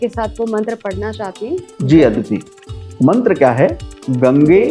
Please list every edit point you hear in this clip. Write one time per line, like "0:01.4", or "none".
none